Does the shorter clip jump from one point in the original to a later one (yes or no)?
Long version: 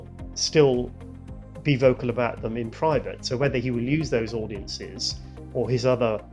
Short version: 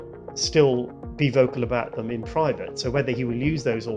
yes